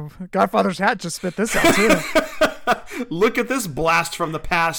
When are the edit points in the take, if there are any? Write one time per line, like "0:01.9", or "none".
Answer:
0:01.6